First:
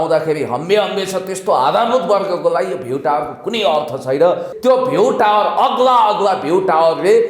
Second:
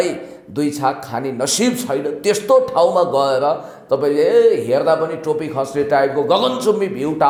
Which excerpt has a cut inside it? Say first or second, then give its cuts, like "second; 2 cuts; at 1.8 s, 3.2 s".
first; 1 cut; at 4.5 s